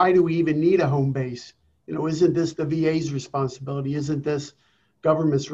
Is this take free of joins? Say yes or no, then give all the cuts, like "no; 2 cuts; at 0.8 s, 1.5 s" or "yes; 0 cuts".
yes; 0 cuts